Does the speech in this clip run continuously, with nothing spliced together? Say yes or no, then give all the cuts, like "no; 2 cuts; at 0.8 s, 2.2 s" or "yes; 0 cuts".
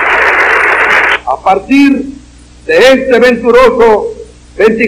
no; 1 cut; at 1.1 s